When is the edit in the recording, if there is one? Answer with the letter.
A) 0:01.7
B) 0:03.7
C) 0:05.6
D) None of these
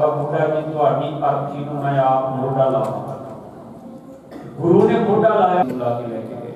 C